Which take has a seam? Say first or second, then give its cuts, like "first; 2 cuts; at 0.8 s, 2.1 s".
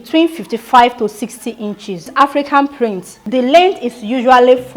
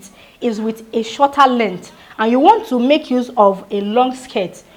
first; 2 cuts; at 2.1 s, 3.1 s